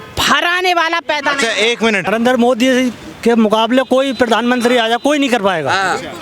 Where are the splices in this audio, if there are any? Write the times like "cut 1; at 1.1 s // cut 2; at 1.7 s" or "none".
cut 1; at 2.1 s